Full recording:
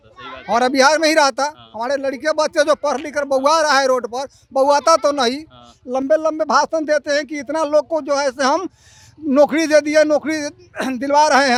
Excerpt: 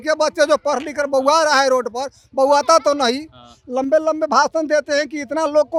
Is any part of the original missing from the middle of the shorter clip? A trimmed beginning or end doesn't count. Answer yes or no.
no